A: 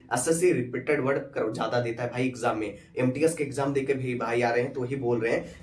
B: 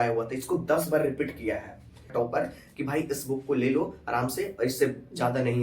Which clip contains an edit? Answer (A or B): B